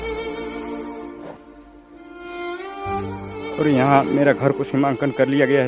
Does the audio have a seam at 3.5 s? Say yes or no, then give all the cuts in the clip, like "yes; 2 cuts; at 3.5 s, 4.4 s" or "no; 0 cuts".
yes; 1 cut; at 3.5 s